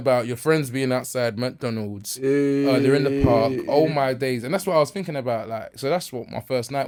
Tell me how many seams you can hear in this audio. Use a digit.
0